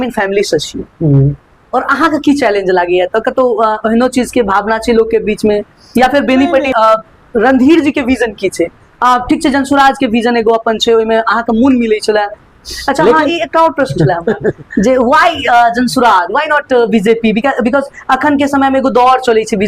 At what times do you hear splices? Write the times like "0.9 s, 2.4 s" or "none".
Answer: 6.7 s, 12.5 s